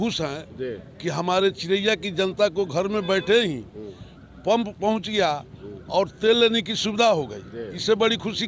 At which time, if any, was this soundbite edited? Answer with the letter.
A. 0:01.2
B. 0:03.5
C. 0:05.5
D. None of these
D